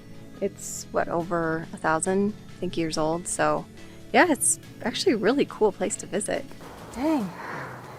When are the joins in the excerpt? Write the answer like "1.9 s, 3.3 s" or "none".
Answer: 6.5 s